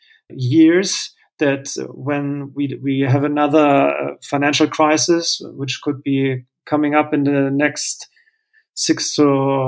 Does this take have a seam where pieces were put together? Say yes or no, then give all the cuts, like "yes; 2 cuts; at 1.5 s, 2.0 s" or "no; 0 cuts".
no; 0 cuts